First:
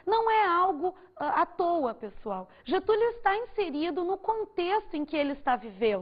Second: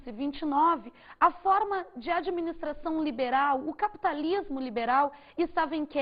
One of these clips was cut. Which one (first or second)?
first